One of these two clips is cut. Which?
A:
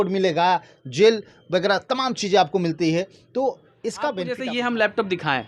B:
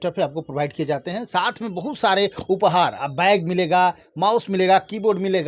A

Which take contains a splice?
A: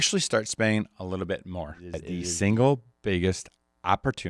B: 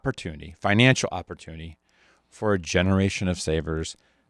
A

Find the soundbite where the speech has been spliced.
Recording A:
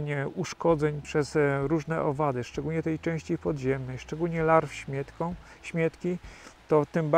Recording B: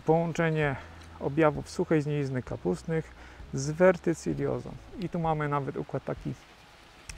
A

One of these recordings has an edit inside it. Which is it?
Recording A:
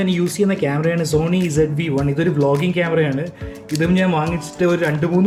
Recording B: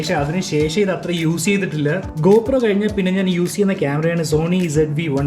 B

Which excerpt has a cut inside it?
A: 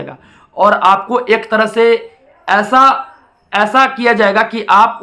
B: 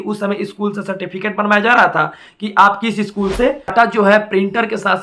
B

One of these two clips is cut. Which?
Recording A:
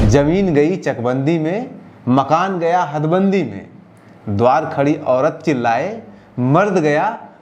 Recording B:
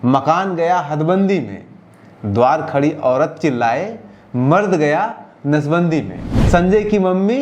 B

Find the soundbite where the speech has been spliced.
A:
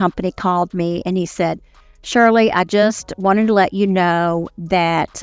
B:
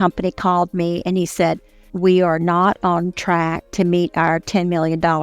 B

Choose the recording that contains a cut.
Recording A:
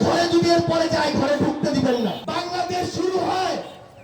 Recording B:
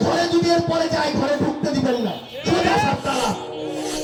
A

